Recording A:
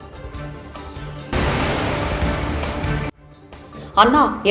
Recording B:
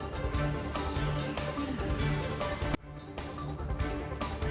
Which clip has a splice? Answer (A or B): A